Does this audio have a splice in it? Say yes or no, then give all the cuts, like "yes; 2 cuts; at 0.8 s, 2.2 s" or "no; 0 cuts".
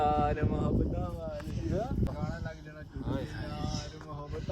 yes; 1 cut; at 2.1 s